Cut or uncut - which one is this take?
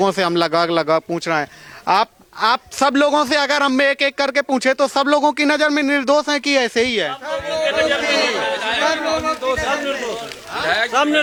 uncut